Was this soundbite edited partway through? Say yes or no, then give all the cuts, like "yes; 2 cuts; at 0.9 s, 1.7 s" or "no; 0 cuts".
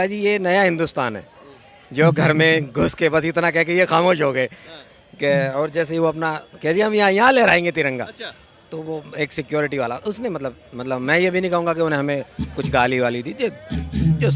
no; 0 cuts